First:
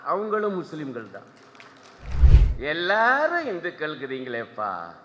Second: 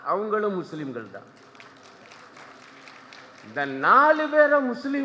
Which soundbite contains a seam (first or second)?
first